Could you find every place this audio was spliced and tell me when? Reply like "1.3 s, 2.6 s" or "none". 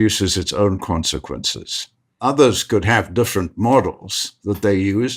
2.1 s